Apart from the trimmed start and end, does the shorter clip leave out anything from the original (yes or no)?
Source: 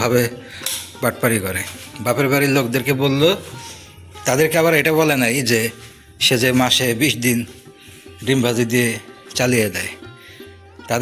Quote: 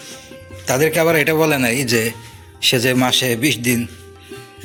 no